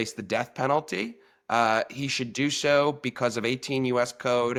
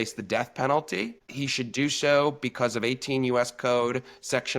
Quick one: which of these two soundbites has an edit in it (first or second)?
second